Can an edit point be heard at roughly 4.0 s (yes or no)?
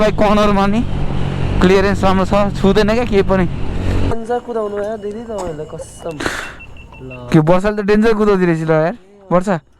yes